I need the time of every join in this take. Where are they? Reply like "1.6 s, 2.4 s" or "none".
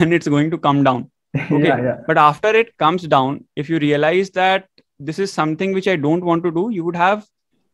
none